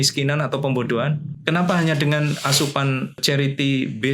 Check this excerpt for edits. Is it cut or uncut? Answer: cut